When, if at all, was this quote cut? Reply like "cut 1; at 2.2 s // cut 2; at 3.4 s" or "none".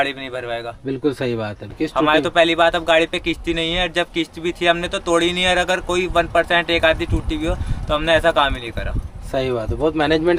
none

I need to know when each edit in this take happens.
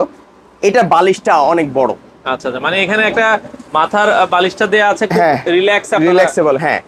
none

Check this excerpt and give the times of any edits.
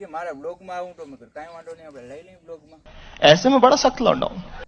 none

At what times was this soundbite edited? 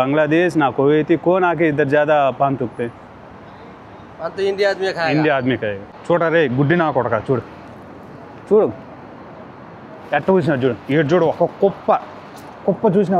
cut 1; at 5.9 s

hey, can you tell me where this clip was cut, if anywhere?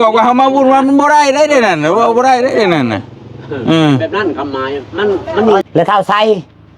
cut 1; at 5.6 s

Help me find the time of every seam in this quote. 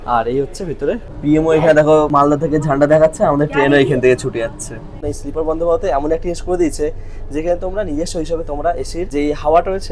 cut 1; at 1.1 s // cut 2; at 2.1 s // cut 3; at 5.0 s // cut 4; at 9.1 s

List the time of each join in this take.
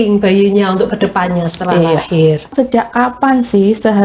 cut 1; at 2.5 s

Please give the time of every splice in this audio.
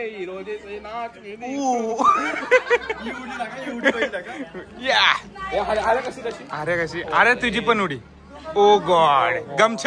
none

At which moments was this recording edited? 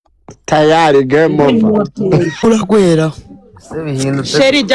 cut 1; at 2.4 s

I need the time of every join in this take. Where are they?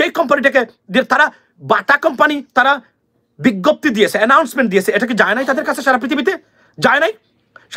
none

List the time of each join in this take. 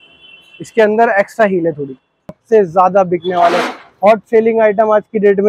cut 1; at 2.3 s

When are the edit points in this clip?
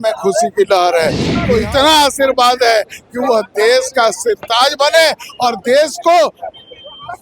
cut 1; at 1.3 s

